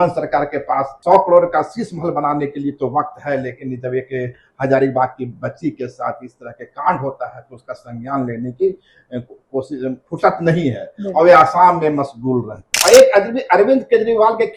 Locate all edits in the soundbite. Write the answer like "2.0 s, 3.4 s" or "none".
0.9 s, 12.6 s